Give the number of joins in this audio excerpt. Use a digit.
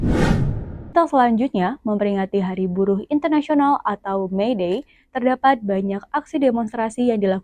1